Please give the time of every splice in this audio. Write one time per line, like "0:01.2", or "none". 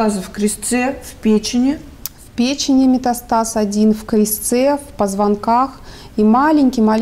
none